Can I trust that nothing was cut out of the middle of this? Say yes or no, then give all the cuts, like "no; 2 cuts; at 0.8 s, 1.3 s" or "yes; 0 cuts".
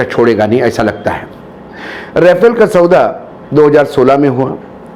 yes; 0 cuts